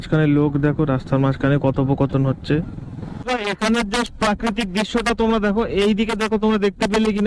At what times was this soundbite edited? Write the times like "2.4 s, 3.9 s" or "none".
none